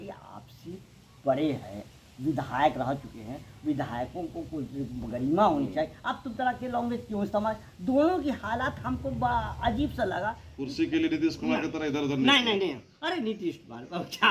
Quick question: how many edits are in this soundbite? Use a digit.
1